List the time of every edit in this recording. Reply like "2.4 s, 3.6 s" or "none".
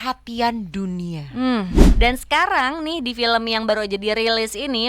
1.8 s